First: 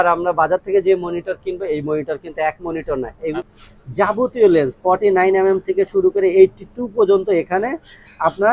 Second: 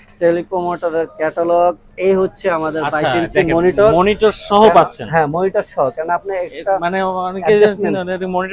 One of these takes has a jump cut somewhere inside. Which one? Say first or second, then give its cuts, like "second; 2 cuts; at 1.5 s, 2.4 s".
first; 1 cut; at 3.3 s